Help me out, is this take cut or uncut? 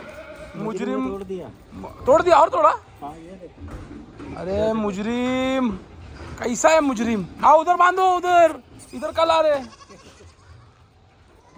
uncut